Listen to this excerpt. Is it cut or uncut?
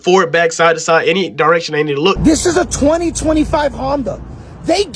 cut